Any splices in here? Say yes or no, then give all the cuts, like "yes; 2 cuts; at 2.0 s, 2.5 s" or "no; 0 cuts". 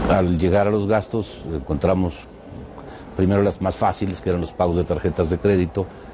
no; 0 cuts